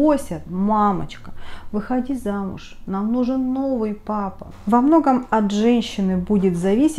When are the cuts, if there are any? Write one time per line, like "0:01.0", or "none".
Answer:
0:04.4